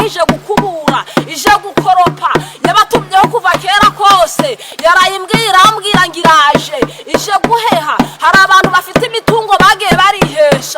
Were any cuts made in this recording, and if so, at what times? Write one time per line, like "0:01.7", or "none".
none